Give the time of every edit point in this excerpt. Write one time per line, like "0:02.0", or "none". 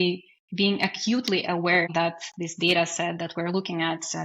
0:01.9